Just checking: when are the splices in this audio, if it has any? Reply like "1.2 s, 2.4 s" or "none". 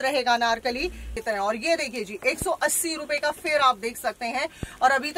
1.2 s